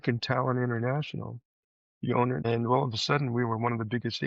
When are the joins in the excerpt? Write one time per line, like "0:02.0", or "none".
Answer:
0:02.4